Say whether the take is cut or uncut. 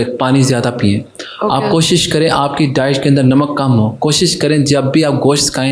uncut